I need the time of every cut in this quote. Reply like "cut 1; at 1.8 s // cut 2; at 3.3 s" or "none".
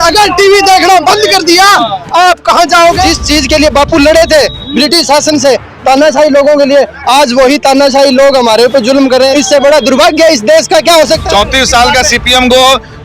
cut 1; at 3.0 s // cut 2; at 9.3 s // cut 3; at 11.2 s